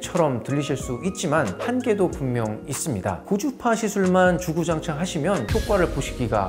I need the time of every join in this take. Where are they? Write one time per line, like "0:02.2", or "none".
0:03.2